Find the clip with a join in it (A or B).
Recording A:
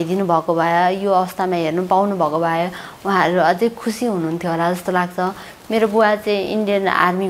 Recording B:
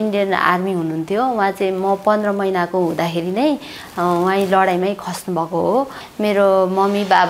B